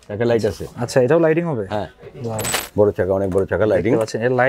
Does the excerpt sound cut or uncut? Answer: cut